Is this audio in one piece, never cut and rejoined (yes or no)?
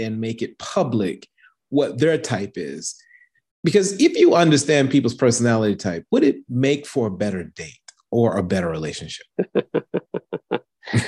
yes